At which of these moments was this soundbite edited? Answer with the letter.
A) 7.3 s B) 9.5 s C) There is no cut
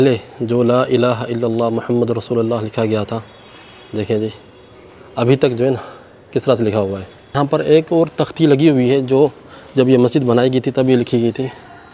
A